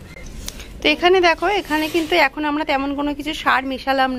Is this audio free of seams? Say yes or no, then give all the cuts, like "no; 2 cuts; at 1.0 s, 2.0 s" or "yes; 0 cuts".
yes; 0 cuts